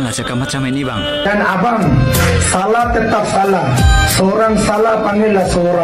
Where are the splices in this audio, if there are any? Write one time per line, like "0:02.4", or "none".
0:01.2